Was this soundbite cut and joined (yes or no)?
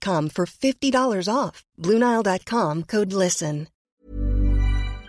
yes